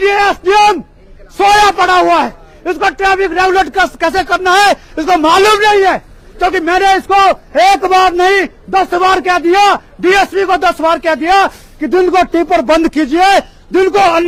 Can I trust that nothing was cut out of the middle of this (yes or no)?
yes